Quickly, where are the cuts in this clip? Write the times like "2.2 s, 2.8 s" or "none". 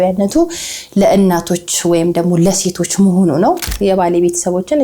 3.7 s